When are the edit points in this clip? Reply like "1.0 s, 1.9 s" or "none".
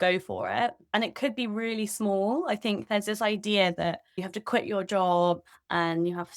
0.9 s, 4.2 s